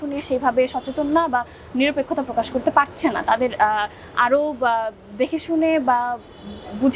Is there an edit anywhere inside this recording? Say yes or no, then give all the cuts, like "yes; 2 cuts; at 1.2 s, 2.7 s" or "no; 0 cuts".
no; 0 cuts